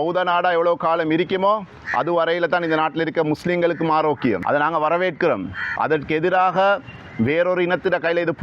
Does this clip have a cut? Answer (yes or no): yes